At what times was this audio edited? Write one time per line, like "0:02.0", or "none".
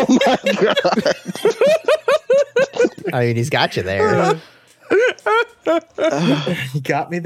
0:02.9